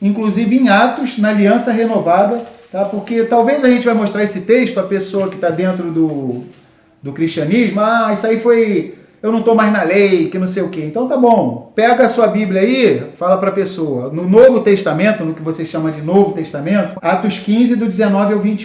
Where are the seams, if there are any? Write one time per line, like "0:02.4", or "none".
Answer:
0:16.9